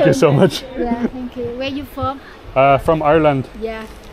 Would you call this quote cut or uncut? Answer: uncut